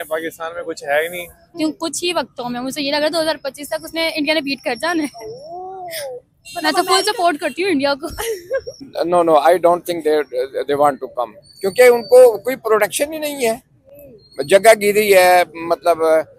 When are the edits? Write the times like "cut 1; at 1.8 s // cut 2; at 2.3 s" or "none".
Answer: cut 1; at 1.6 s // cut 2; at 8.8 s